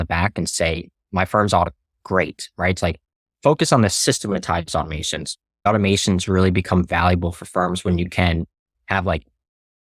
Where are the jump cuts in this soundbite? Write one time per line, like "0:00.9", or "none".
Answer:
0:04.0
0:05.7